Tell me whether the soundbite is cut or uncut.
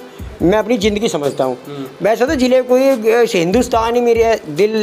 uncut